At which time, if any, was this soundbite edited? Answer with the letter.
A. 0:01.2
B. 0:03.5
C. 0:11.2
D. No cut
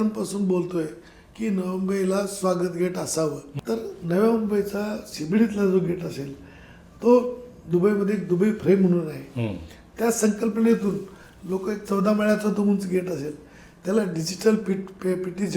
B